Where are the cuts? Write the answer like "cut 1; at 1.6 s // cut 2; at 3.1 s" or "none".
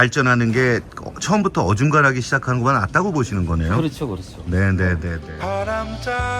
cut 1; at 5.4 s